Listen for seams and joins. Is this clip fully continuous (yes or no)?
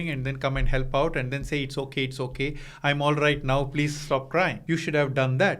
no